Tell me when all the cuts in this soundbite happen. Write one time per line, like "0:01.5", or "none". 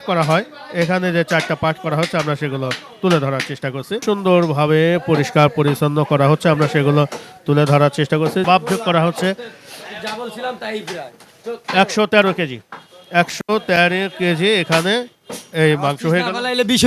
0:04.0
0:08.4